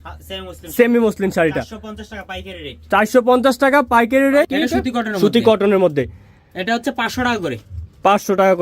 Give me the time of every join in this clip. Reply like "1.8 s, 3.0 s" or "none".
4.5 s